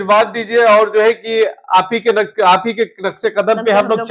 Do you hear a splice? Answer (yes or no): no